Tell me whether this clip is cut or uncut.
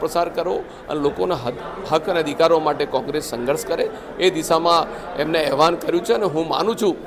uncut